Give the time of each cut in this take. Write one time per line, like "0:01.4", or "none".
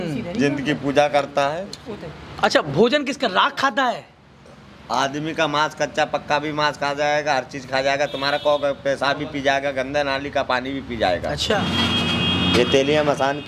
0:11.6